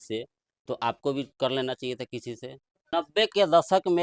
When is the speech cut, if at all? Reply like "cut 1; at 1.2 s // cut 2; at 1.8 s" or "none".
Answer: cut 1; at 2.9 s